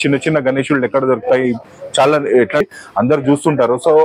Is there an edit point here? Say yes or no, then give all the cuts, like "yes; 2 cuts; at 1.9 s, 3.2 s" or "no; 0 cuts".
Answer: yes; 1 cut; at 2.6 s